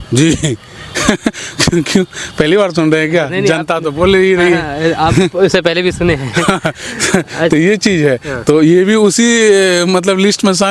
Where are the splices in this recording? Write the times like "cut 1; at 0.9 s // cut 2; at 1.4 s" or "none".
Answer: none